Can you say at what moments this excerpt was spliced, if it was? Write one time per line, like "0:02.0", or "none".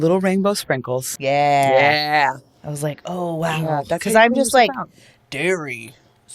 0:01.1